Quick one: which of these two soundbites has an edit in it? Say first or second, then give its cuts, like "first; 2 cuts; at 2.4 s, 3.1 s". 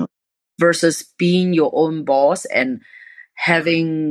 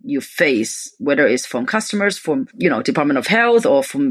second; 1 cut; at 2.5 s